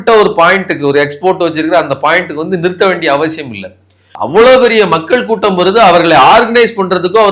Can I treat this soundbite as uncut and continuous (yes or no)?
no